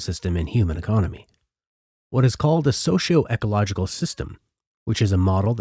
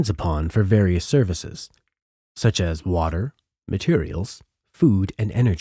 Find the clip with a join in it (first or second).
first